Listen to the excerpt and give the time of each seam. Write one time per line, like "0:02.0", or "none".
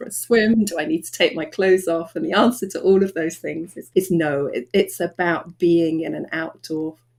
none